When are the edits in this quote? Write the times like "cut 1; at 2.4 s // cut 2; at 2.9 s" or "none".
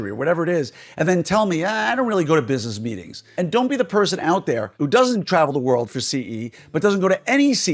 cut 1; at 3.3 s // cut 2; at 4.7 s